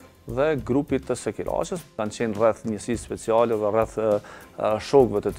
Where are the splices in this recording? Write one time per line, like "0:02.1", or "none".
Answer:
none